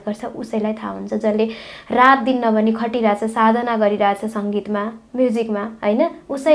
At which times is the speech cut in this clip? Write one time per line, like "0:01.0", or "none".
none